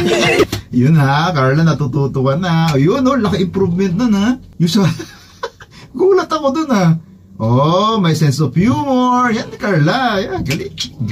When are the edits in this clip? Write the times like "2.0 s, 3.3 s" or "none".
4.5 s